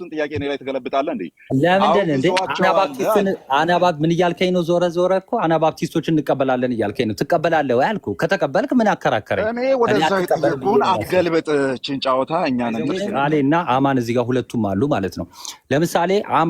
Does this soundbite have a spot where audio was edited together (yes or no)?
yes